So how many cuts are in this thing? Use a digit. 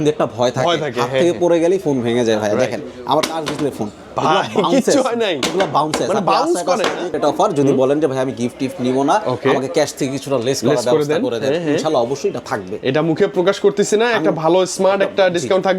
1